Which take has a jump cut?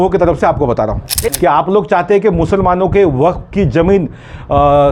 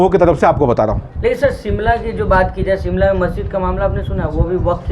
first; 1 cut; at 1.3 s

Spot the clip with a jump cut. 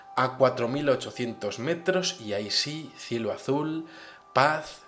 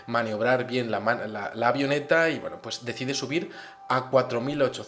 second; 1 cut; at 2.0 s

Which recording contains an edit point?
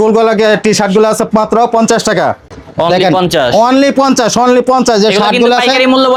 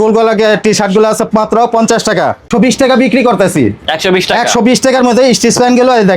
second; 1 cut; at 2.5 s

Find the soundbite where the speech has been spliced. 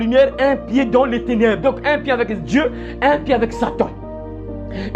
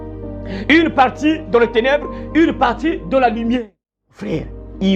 second; 1 cut; at 3.6 s

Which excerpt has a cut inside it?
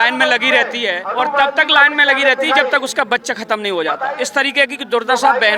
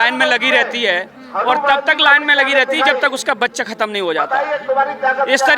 first; 2 cuts; at 1.0 s, 4.1 s

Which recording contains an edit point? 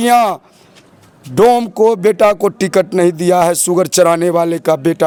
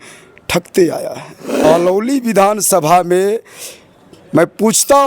second; 1 cut; at 1.6 s

